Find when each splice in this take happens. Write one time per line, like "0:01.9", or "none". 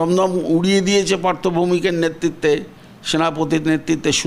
none